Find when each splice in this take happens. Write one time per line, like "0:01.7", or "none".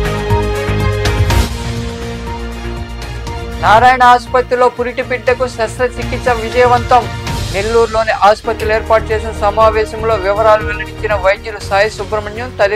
0:01.1